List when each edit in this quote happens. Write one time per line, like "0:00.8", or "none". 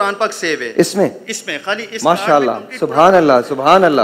none